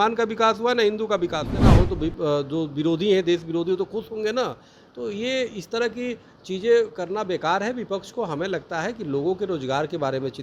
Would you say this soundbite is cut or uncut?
cut